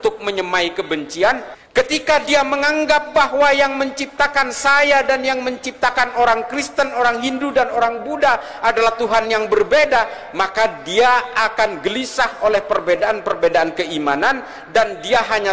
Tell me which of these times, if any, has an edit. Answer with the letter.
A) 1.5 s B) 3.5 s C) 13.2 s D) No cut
A